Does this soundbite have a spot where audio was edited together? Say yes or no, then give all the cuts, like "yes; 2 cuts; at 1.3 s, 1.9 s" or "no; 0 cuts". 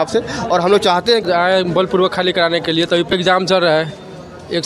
yes; 2 cuts; at 1.2 s, 3.1 s